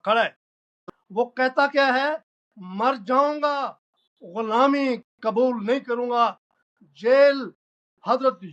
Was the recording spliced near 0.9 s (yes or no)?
yes